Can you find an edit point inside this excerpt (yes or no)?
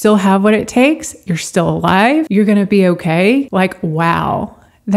yes